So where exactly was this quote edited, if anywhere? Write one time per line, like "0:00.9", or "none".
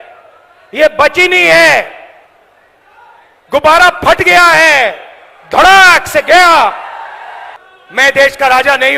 0:07.6

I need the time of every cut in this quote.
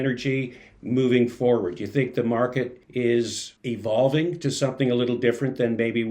0:02.8
0:03.5

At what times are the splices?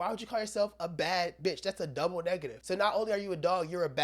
0:02.5

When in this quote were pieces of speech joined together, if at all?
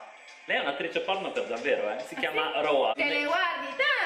0:02.9

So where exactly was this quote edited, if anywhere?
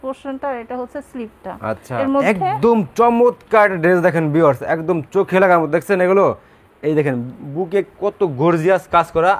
0:02.0

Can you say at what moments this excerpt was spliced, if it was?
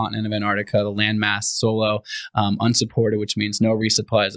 none

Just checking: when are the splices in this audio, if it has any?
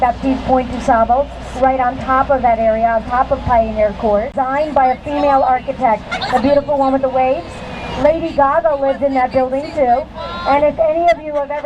0:04.3

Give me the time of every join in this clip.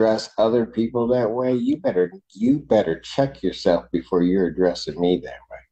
none

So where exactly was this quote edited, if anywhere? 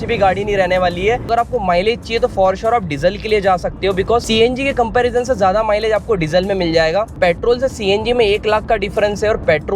0:01.3
0:07.1

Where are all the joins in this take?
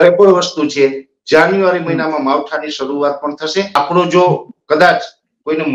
0:03.8

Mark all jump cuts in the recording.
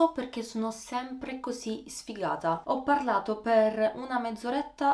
none

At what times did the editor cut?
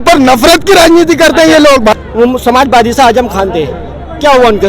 0:01.9

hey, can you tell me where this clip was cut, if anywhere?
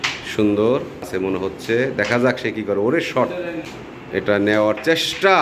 0:01.1
0:03.7

